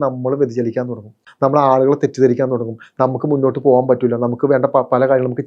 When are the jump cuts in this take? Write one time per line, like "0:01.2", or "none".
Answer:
0:01.2